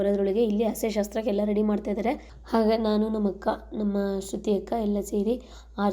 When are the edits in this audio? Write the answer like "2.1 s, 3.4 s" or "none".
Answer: 2.3 s